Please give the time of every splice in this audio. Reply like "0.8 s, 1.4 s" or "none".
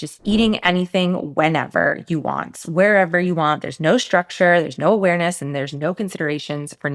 none